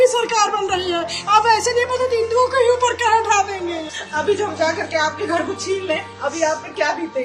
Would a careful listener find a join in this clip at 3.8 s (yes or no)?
yes